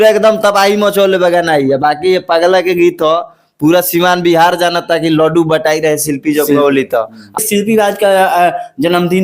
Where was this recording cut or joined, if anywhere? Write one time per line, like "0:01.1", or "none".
0:07.4